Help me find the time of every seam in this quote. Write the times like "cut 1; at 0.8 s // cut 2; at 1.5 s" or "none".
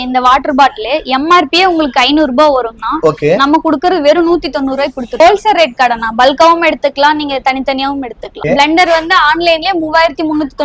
cut 1; at 5.2 s // cut 2; at 8.4 s

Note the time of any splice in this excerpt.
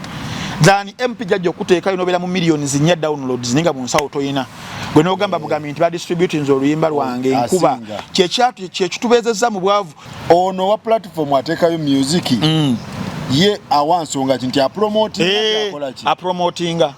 cut 1; at 10.0 s

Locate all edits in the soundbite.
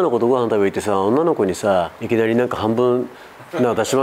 cut 1; at 2.0 s

